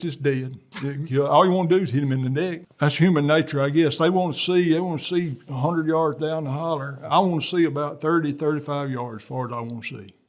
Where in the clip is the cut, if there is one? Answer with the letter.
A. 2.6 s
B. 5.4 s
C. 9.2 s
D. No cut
A